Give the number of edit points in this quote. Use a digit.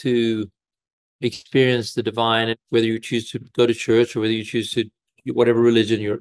1